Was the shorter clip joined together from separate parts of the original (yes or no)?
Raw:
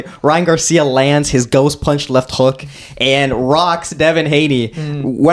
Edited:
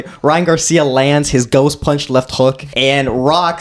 yes